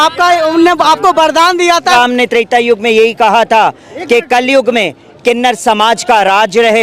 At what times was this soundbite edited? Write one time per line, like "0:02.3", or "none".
0:01.9